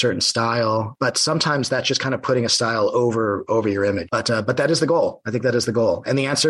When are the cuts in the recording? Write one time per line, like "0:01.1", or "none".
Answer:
0:00.9
0:04.1